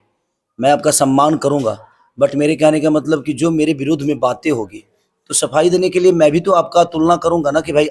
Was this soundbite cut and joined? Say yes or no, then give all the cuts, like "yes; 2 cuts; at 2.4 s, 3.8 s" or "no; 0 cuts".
no; 0 cuts